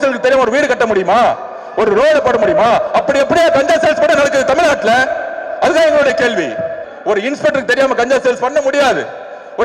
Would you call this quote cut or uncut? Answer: cut